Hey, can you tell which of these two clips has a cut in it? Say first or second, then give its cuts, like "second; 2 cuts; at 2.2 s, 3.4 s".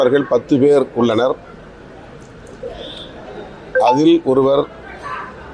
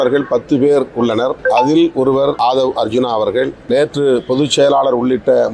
second; 3 cuts; at 1.4 s, 2.4 s, 3.6 s